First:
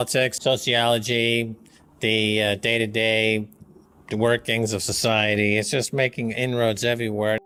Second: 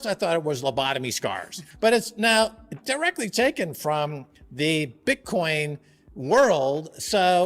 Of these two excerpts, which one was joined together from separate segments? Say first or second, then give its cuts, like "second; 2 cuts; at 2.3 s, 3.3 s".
second; 1 cut; at 1.6 s